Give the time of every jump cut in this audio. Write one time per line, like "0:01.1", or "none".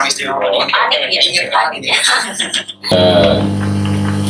0:02.9